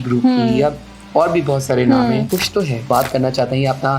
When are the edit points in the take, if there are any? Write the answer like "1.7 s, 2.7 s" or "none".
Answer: 2.8 s

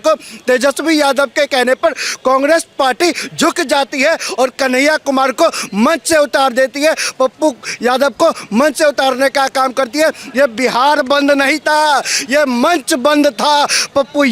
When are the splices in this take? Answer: none

